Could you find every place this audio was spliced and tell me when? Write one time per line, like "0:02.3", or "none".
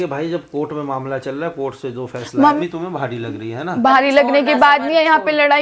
0:02.6